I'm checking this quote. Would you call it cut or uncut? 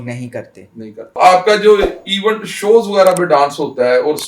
cut